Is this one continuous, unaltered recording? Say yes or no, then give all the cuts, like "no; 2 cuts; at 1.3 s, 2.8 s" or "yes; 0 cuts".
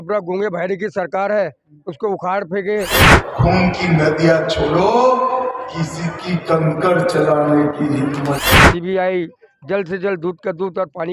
no; 2 cuts; at 3.1 s, 8.4 s